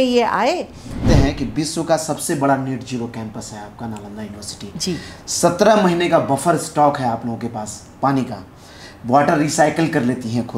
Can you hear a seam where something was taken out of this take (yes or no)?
yes